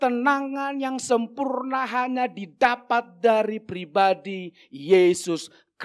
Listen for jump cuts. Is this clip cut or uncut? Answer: uncut